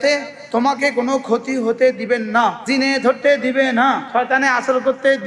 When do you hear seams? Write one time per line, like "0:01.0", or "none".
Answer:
0:02.6
0:04.0